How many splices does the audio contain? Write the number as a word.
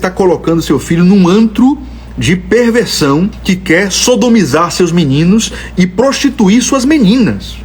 one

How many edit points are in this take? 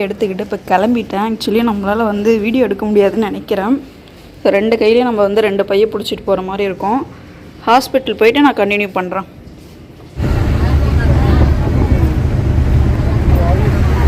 zero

